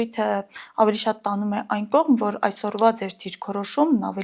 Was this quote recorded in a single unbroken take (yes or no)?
yes